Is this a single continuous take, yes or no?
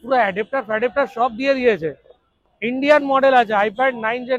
yes